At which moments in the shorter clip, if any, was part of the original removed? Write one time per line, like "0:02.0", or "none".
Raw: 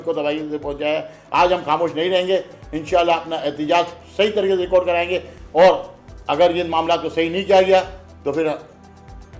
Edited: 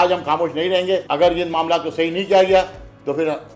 0:01.1